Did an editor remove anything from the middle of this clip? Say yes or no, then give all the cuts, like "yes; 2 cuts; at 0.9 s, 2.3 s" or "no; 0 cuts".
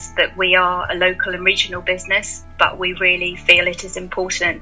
yes; 1 cut; at 2.4 s